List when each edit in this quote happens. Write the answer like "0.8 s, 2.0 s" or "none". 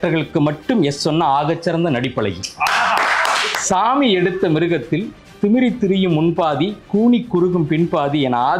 3.5 s